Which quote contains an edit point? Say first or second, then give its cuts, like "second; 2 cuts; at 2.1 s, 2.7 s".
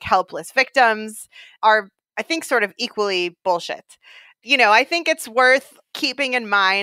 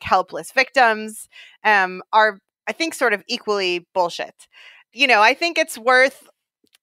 first; 2 cuts; at 1.5 s, 5.8 s